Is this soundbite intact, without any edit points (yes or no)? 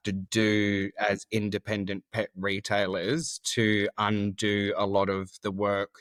yes